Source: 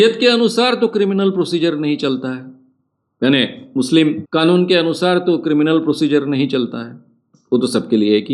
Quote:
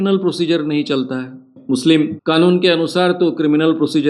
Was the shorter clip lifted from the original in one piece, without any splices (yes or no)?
no